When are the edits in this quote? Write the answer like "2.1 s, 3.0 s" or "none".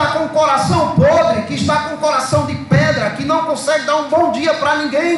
none

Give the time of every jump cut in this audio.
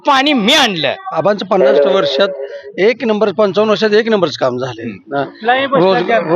1.1 s

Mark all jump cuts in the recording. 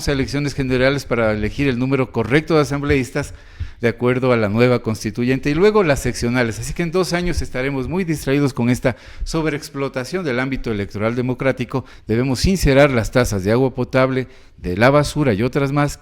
11.9 s

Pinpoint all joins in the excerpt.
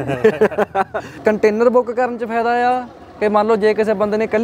1.1 s

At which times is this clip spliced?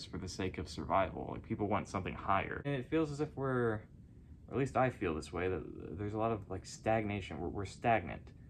2.7 s

